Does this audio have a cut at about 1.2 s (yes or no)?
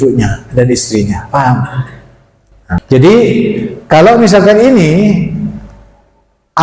no